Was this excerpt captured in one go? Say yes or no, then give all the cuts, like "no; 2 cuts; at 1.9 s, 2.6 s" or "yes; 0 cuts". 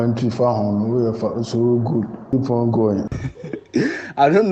no; 1 cut; at 3.1 s